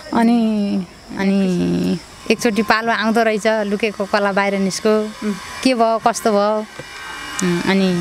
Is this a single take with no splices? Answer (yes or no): no